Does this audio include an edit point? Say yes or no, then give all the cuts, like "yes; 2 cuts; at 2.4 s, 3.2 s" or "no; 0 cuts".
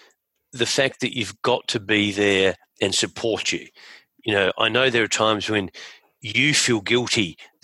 no; 0 cuts